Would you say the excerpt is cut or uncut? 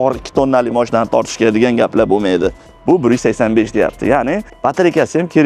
cut